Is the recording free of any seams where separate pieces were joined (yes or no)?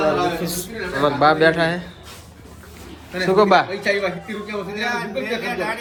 yes